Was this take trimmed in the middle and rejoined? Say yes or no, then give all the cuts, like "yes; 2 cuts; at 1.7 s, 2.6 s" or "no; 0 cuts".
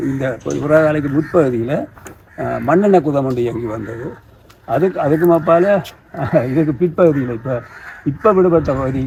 no; 0 cuts